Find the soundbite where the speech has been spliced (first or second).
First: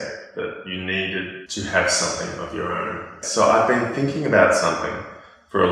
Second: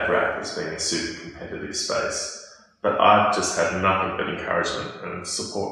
first